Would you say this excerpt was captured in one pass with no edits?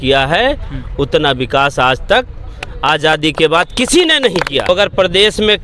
no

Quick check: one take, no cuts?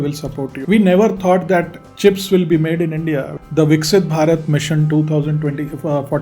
no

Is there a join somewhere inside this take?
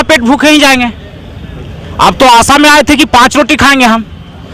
no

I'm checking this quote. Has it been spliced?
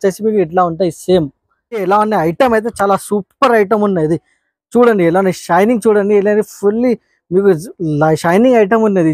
yes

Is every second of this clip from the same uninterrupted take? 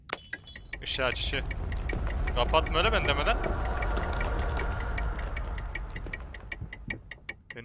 yes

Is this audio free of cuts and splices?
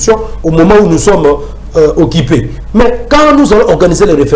no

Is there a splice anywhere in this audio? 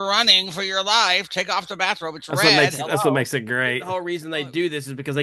yes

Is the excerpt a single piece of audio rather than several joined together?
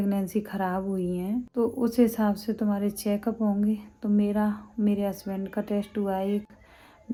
yes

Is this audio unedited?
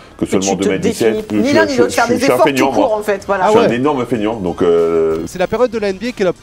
no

